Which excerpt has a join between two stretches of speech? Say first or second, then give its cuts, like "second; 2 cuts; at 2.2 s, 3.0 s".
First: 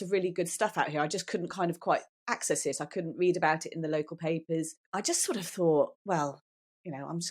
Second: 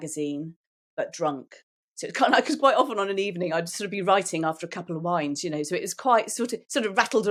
first; 1 cut; at 4.8 s